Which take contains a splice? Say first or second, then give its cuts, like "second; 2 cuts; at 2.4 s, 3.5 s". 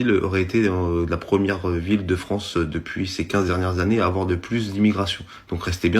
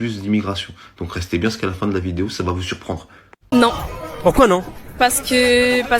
second; 1 cut; at 3.4 s